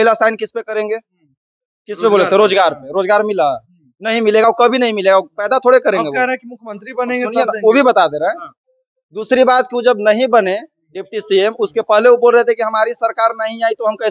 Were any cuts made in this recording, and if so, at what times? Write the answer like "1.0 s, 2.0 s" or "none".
none